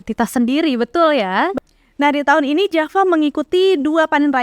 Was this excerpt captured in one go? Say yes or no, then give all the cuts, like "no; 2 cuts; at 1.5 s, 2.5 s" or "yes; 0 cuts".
no; 1 cut; at 1.5 s